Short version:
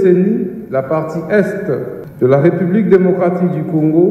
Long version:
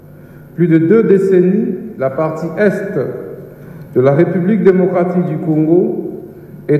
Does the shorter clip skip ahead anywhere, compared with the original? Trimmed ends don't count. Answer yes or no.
yes